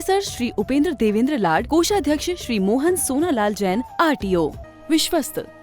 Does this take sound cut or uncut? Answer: cut